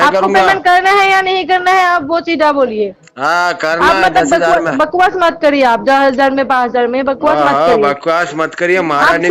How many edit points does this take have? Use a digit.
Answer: 0